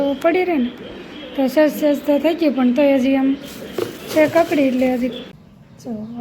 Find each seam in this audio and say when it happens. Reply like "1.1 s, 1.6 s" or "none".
5.3 s